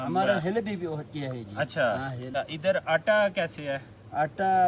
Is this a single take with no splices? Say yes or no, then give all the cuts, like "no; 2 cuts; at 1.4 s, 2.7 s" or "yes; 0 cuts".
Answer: no; 1 cut; at 2.3 s